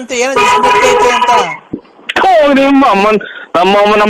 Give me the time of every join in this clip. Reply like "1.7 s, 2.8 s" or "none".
1.9 s

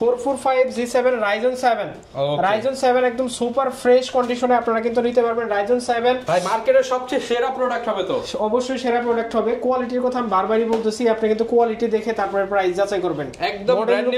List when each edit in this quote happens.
none

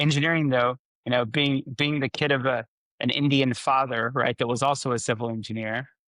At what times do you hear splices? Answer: 0.9 s

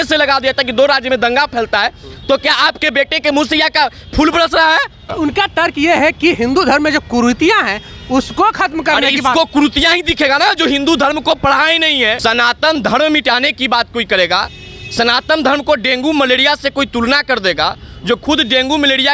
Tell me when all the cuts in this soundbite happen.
5.1 s, 12.2 s

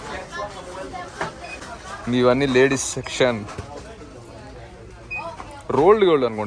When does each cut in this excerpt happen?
1.6 s

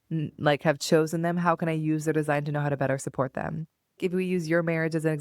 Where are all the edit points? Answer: 4.0 s

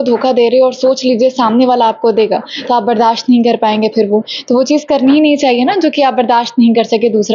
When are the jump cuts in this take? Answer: none

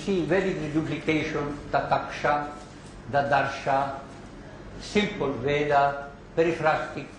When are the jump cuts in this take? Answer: none

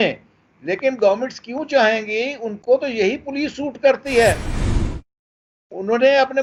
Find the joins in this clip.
none

